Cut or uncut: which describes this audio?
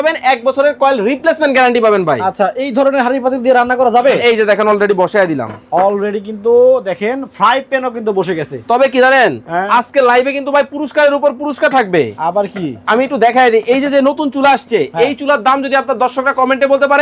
uncut